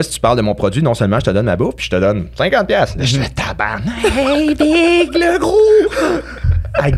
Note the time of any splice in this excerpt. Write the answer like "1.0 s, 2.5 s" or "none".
none